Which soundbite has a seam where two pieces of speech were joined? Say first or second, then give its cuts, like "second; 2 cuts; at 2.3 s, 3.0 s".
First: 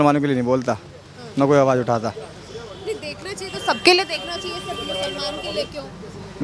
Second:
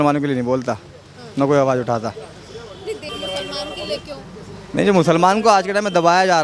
second; 1 cut; at 3.1 s